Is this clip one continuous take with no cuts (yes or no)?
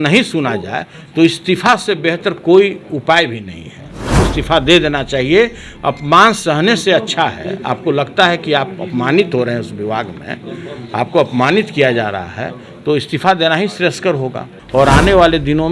no